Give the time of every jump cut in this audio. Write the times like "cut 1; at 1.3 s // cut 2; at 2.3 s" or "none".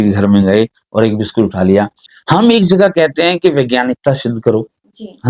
cut 1; at 2.1 s